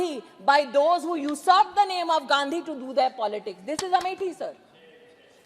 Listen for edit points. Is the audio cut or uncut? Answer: uncut